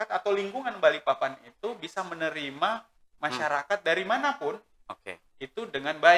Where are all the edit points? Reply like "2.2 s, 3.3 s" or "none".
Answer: none